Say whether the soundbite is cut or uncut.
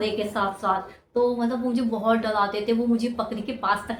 uncut